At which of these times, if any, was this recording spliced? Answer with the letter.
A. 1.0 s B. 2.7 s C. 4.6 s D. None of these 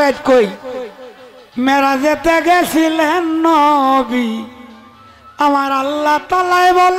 D